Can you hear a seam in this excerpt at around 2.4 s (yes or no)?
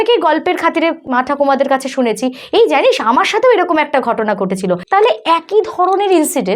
no